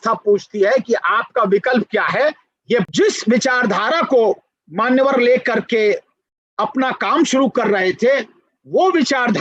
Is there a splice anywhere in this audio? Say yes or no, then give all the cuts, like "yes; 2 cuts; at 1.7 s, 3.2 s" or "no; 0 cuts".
yes; 1 cut; at 2.8 s